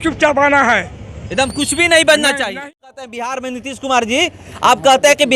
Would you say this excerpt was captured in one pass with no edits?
no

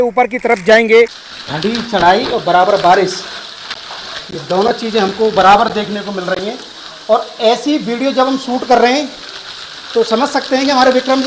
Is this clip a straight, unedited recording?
no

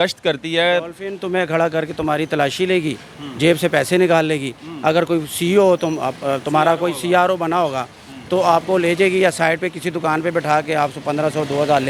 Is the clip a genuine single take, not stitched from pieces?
yes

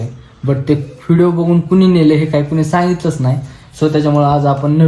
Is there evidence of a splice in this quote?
no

